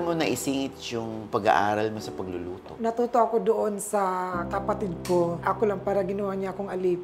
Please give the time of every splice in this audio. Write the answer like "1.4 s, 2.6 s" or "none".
2.7 s, 5.4 s